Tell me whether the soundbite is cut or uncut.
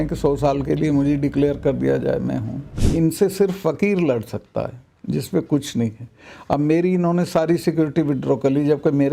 cut